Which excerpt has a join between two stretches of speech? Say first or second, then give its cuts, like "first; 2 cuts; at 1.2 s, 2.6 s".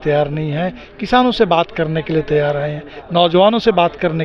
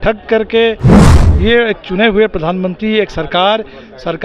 second; 1 cut; at 1.0 s